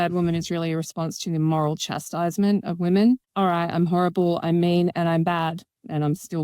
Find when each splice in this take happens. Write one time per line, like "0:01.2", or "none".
0:03.3